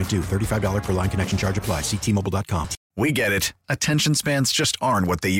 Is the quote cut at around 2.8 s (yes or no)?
yes